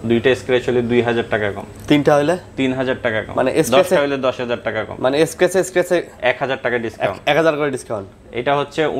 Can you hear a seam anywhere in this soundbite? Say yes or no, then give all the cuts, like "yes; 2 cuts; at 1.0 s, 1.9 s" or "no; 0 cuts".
no; 0 cuts